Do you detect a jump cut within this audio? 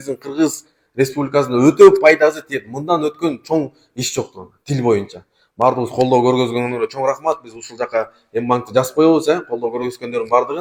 no; 0 cuts

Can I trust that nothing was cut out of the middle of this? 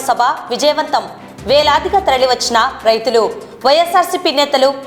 yes; 0 cuts

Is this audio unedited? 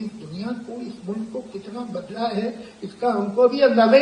yes; 0 cuts

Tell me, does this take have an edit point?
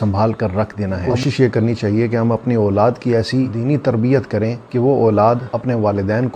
yes; 1 cut; at 1.1 s

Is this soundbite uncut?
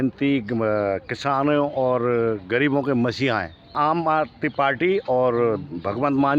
yes; 0 cuts

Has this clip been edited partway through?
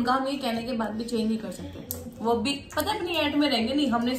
no; 0 cuts

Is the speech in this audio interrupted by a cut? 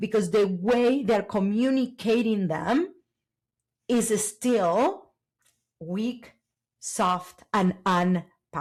no; 0 cuts

